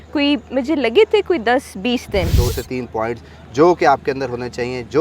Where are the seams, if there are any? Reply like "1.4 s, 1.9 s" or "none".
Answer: 2.3 s